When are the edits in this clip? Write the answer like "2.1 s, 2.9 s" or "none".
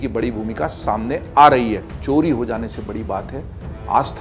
1.9 s